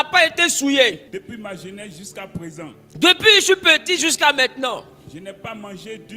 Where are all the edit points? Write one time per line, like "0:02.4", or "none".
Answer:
0:01.0